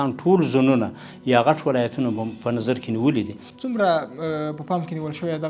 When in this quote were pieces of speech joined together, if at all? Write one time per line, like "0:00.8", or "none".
0:03.4